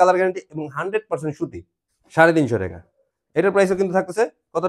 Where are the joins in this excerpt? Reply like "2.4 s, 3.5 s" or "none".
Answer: 1.7 s